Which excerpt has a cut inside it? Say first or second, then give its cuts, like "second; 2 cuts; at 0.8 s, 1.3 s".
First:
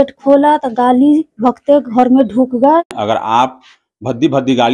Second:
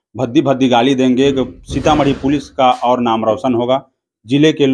first; 1 cut; at 3.0 s